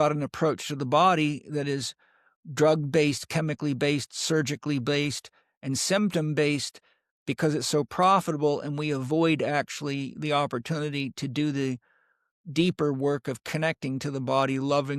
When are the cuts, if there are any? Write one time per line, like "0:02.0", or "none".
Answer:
none